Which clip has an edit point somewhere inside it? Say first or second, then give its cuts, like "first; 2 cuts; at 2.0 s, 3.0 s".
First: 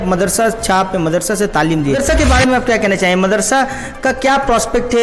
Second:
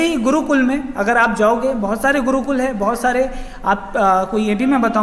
first; 1 cut; at 2.0 s